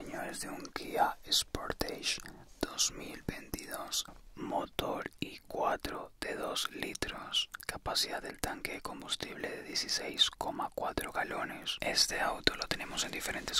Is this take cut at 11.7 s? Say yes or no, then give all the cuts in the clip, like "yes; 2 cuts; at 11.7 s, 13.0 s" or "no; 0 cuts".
yes; 3 cuts; at 4.1 s, 7.5 s, 11.7 s